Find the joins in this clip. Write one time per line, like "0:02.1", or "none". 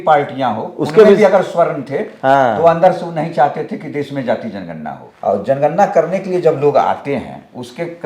0:05.1